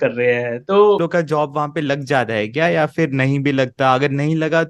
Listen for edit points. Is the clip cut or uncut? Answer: cut